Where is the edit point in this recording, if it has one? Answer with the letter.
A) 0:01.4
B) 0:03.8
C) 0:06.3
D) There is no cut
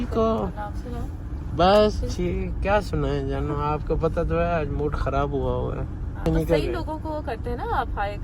C